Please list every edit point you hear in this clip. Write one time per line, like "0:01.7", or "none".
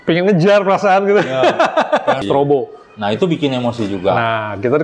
0:02.2